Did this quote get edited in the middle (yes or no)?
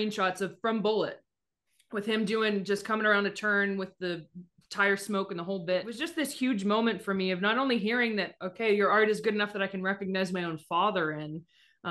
yes